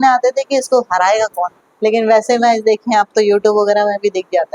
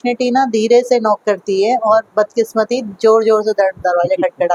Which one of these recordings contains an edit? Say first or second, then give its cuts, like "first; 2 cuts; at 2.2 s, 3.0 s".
first; 1 cut; at 1.6 s